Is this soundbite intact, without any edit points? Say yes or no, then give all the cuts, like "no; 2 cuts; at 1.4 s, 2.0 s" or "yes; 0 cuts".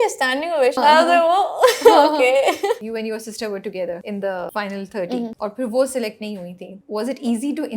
no; 5 cuts; at 0.8 s, 2.8 s, 4.3 s, 5.3 s, 6.8 s